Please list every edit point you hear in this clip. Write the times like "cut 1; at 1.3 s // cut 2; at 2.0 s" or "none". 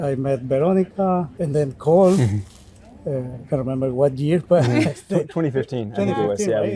cut 1; at 1.3 s